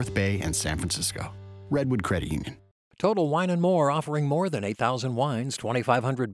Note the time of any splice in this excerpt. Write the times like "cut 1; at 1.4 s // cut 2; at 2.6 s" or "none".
cut 1; at 2.6 s